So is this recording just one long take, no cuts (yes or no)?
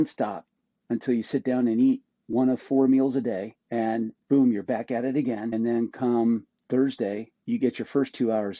no